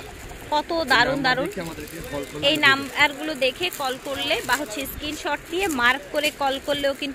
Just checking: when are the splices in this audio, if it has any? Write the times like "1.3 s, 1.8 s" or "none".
none